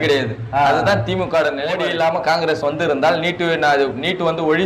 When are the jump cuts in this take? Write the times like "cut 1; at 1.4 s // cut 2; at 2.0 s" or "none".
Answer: cut 1; at 1.8 s